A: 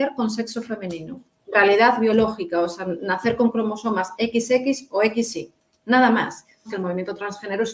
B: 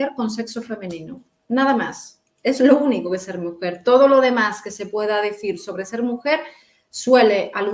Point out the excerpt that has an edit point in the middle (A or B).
A